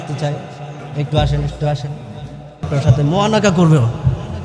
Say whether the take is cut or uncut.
cut